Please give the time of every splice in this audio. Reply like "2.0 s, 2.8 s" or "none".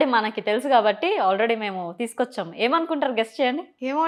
none